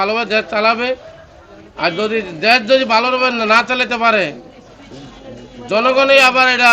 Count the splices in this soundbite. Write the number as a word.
zero